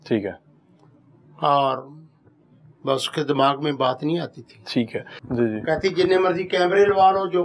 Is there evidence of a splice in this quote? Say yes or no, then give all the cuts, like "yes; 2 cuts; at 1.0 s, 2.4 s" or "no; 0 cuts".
yes; 1 cut; at 5.2 s